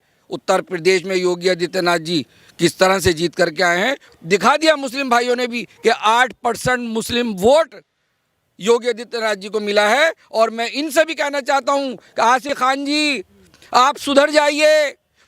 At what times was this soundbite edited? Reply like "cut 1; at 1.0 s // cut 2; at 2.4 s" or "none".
cut 1; at 4.0 s // cut 2; at 12.5 s